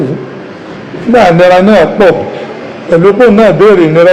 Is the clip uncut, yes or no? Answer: yes